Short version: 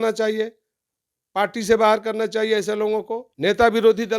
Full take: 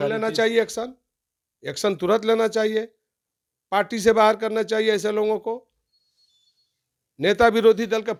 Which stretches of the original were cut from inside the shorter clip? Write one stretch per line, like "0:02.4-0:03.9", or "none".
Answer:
0:05.6-0:07.1